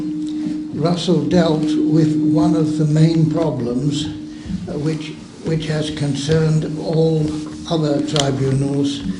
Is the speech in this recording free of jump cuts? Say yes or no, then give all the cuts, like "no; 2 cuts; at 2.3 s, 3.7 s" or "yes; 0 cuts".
no; 1 cut; at 4.3 s